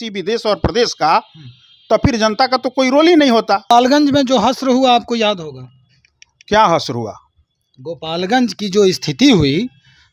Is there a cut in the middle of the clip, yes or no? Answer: yes